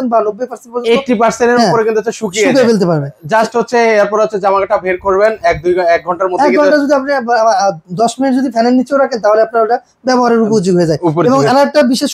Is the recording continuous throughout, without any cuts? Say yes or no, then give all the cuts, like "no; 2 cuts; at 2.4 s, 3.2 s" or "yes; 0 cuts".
yes; 0 cuts